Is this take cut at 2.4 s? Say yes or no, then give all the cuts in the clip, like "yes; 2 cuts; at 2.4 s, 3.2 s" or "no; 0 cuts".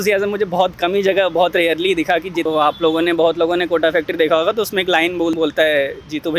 yes; 2 cuts; at 2.4 s, 5.3 s